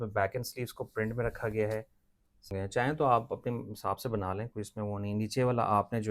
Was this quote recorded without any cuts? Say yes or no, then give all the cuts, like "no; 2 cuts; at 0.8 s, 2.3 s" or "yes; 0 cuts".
no; 1 cut; at 2.5 s